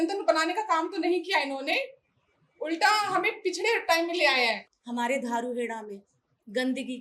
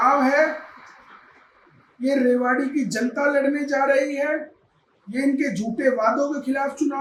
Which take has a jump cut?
first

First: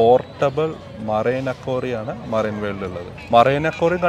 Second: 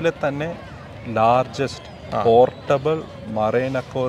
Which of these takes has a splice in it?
first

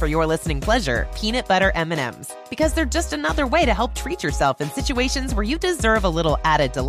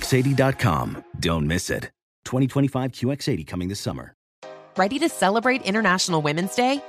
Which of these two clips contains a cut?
second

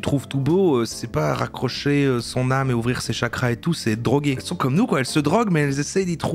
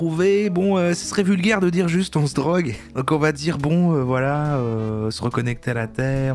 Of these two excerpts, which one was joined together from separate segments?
first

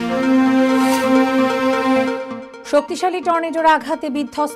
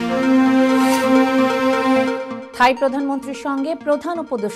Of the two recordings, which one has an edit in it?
first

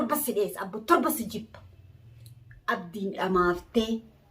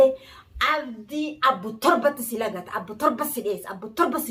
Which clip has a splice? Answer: first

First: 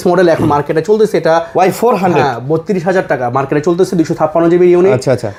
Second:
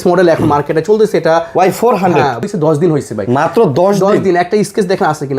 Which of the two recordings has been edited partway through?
second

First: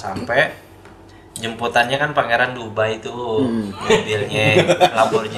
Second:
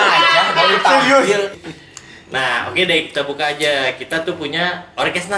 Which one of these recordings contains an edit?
second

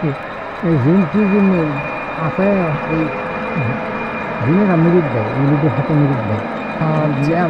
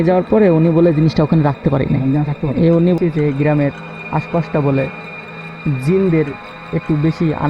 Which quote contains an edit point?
second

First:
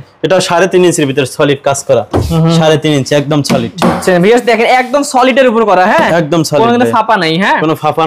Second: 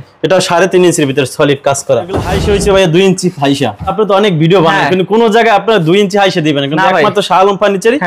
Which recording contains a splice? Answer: second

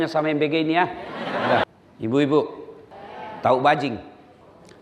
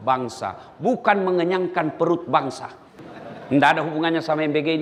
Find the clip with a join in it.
first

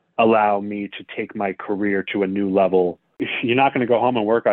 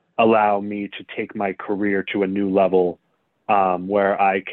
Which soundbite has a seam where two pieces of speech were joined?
first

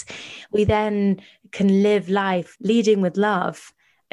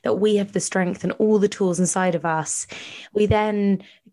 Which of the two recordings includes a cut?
first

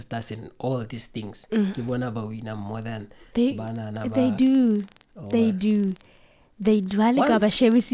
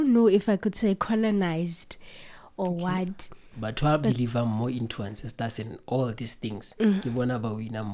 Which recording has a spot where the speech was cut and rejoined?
second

